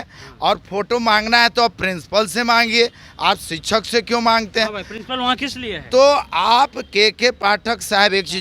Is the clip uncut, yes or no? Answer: yes